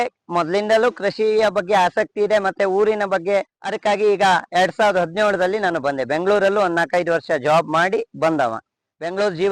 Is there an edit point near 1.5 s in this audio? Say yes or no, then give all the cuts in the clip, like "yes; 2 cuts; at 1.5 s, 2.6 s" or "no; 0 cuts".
no; 1 cut; at 3.6 s